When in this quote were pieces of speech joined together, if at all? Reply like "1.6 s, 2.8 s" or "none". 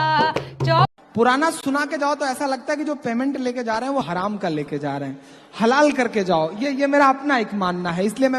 0.9 s